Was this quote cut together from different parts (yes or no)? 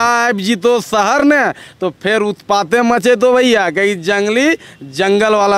no